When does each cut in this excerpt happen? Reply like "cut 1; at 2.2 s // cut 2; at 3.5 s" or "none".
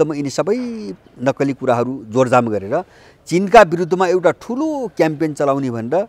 none